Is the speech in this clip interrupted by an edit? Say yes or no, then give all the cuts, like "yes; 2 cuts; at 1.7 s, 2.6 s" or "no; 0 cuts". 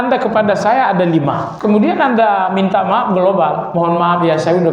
yes; 1 cut; at 1.5 s